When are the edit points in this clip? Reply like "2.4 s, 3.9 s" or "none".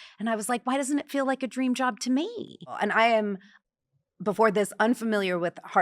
2.7 s